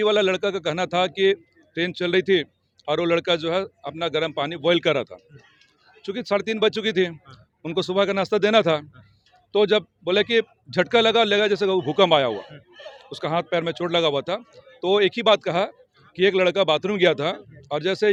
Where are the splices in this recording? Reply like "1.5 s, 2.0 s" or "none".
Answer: none